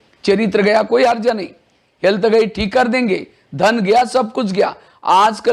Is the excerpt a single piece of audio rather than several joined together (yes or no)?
yes